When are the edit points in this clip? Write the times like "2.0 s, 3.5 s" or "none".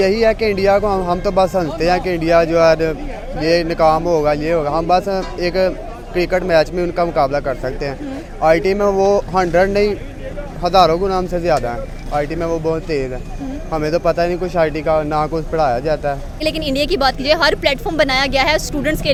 none